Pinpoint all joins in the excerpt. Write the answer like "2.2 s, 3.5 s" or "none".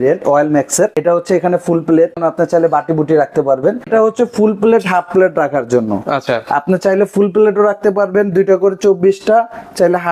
1.0 s, 2.2 s, 3.9 s